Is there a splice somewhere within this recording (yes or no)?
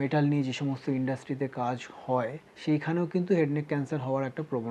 yes